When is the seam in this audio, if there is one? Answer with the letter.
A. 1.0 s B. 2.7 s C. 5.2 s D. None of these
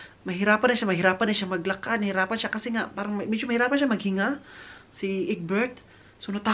D